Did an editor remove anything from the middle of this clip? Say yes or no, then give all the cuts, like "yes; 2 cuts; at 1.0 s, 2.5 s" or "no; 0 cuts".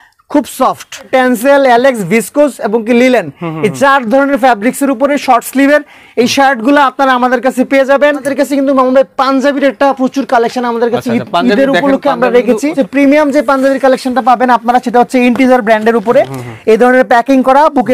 yes; 3 cuts; at 1.1 s, 8.3 s, 12.7 s